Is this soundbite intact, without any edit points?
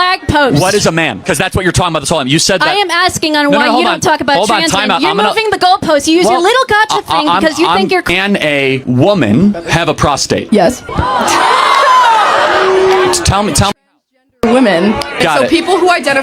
no; 1 cut; at 8.0 s

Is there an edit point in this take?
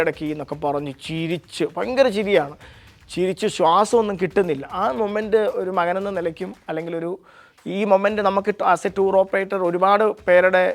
no; 0 cuts

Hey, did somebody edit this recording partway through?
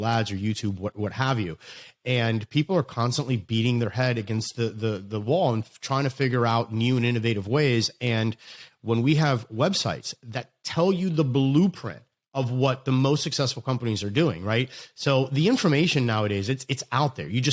no; 0 cuts

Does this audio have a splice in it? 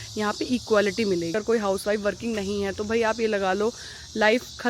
yes; 1 cut; at 1.3 s

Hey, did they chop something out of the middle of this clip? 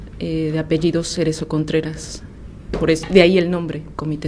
yes; 1 cut; at 3.0 s

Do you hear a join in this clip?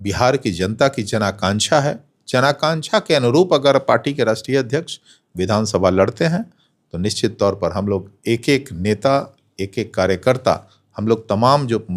no; 0 cuts

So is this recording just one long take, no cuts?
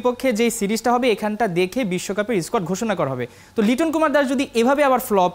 yes; 0 cuts

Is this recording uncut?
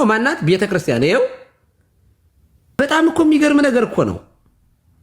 no; 1 cut; at 2.8 s

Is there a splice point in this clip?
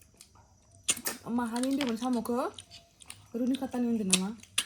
no; 0 cuts

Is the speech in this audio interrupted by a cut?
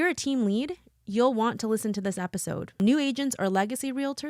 yes; 1 cut; at 2.8 s

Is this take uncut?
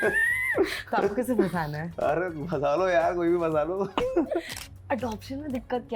no; 1 cut; at 4.6 s

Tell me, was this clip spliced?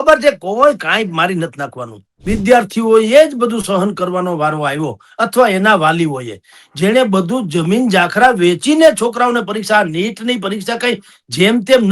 yes; 1 cut; at 2.2 s

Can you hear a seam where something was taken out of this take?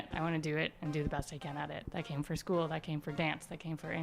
yes; 1 cut; at 1.8 s

